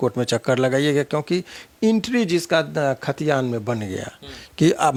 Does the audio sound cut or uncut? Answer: uncut